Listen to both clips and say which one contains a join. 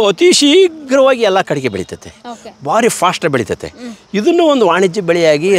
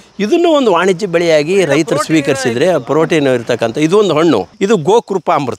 second; 1 cut; at 4.5 s

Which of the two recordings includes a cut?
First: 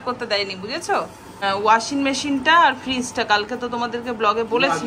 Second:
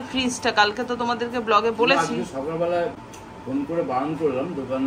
first; 1 cut; at 1.4 s

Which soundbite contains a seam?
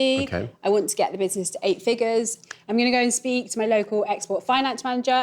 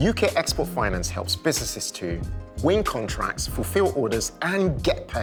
first; 1 cut; at 2.4 s

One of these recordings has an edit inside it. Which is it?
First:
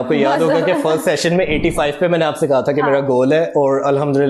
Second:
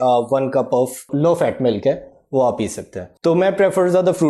second; 1 cut; at 1.1 s

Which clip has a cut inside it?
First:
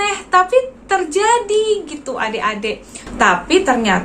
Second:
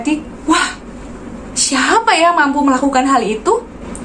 first; 1 cut; at 3.0 s

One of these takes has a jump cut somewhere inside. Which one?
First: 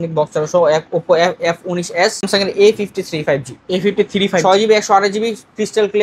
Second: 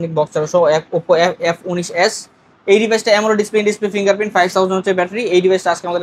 first; 1 cut; at 2.3 s

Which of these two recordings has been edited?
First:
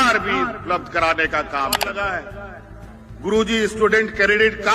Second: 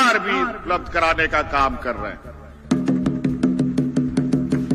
first; 1 cut; at 1.8 s

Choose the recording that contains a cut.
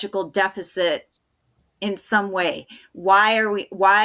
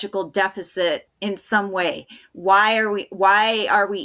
second; 1 cut; at 1.1 s

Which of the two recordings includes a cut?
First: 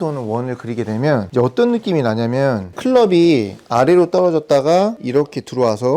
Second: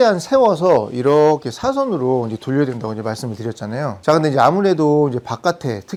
first; 3 cuts; at 1.3 s, 2.7 s, 5.0 s

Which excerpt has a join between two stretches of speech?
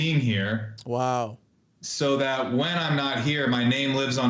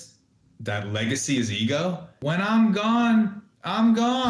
second; 1 cut; at 2.1 s

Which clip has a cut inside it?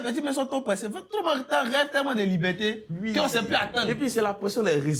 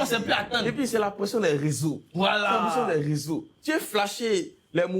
second; 1 cut; at 3.5 s

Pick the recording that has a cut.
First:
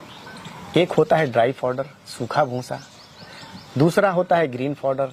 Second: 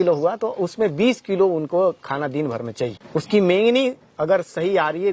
second; 1 cut; at 3.0 s

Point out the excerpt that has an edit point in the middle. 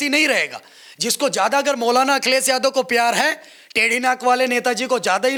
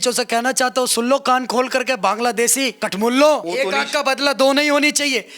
second; 2 cuts; at 2.8 s, 3.5 s

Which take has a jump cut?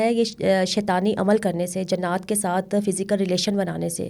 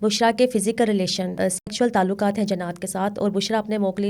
second; 1 cut; at 1.3 s

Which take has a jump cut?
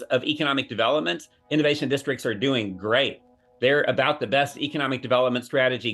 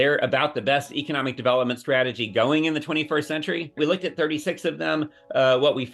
second; 1 cut; at 3.8 s

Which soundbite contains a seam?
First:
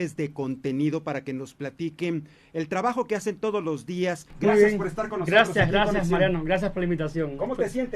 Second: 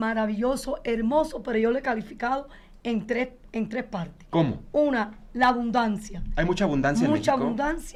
first; 1 cut; at 4.3 s

